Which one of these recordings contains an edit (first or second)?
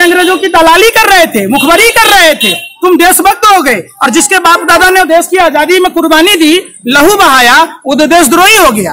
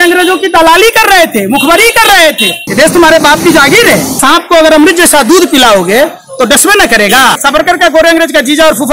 second